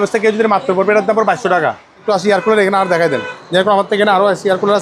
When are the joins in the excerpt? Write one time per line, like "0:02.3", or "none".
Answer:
0:02.0